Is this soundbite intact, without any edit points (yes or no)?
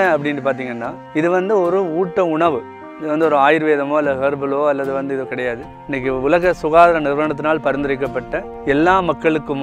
no